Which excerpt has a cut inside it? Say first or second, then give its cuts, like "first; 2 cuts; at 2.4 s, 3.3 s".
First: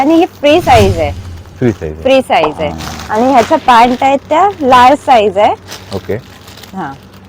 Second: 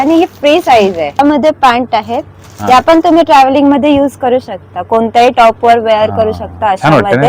second; 1 cut; at 1.2 s